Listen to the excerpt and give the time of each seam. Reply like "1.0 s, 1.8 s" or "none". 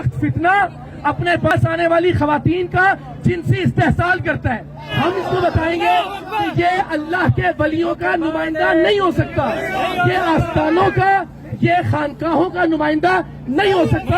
1.5 s, 4.9 s